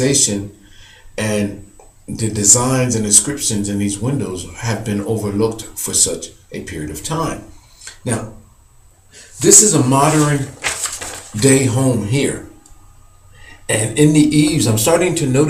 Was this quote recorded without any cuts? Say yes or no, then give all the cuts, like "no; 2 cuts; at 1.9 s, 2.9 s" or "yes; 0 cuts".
yes; 0 cuts